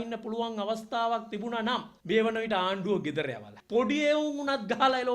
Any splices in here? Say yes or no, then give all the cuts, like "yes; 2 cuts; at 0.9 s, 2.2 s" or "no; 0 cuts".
yes; 1 cut; at 3.5 s